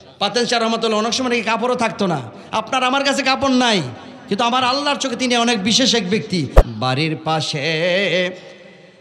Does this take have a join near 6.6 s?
yes; 1 cut; at 6.6 s

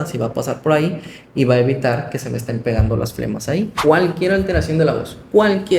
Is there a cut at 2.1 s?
no; 1 cut; at 3.7 s

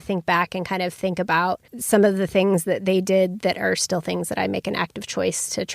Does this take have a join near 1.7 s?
yes; 1 cut; at 1.7 s

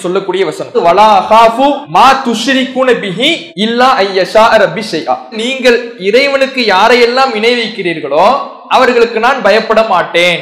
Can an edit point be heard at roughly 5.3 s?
no; 3 cuts; at 0.8 s, 1.8 s, 3.5 s

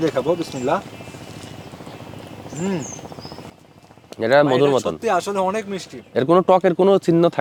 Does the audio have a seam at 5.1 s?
no; 0 cuts

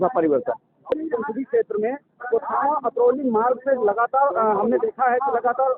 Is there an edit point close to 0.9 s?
yes; 1 cut; at 0.9 s

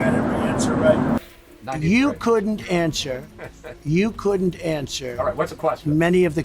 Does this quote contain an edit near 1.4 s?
yes; 1 cut; at 1.4 s

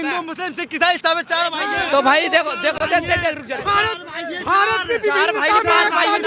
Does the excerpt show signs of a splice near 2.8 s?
no; 0 cuts

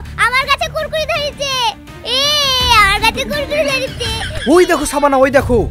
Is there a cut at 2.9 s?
no; 1 cut; at 4.2 s

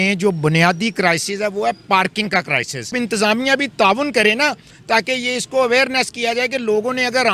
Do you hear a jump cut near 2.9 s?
yes; 1 cut; at 2.9 s

